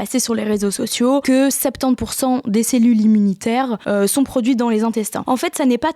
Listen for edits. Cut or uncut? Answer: cut